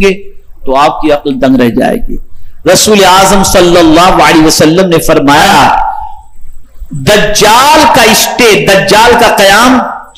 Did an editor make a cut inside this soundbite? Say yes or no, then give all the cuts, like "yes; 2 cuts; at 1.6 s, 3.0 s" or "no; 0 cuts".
yes; 1 cut; at 5.5 s